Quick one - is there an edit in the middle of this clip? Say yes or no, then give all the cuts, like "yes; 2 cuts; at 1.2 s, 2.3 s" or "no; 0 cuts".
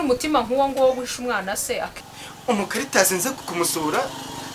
yes; 2 cuts; at 2.0 s, 3.4 s